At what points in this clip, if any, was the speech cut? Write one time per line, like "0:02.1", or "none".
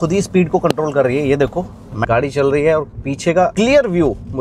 0:02.0
0:03.5